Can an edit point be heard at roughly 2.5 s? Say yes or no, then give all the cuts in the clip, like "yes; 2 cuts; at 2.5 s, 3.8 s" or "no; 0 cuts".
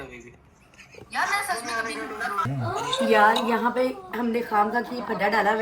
yes; 1 cut; at 2.5 s